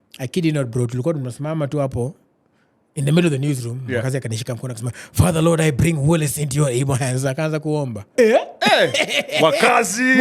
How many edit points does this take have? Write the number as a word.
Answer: one